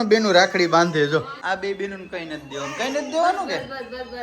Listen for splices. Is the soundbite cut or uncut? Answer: cut